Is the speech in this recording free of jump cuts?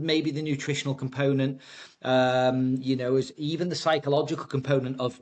yes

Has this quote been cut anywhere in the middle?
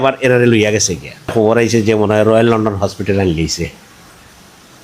yes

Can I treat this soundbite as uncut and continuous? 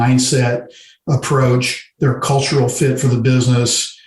no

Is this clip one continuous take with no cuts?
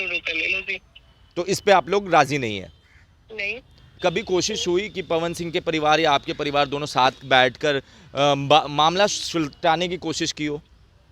no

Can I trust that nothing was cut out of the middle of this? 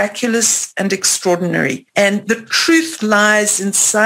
no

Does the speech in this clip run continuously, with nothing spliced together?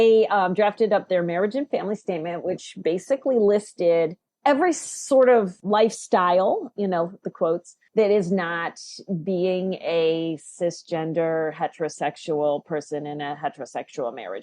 no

